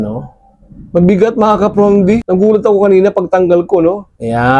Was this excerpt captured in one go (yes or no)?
yes